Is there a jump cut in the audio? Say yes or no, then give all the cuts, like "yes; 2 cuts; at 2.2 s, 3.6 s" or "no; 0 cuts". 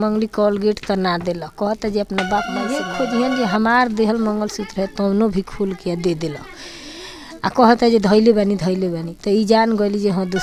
yes; 1 cut; at 2.9 s